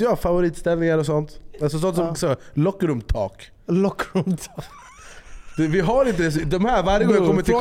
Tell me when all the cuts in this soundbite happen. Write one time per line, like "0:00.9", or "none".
none